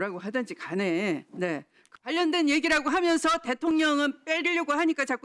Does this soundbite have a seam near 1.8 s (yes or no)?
yes